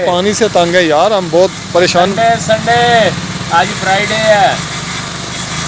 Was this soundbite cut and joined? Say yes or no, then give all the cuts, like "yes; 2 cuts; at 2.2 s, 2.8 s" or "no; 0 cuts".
no; 0 cuts